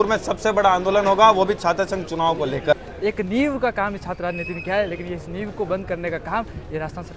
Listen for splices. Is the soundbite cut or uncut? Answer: cut